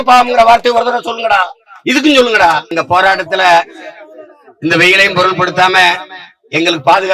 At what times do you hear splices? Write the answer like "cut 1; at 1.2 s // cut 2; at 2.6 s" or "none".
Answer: cut 1; at 2.7 s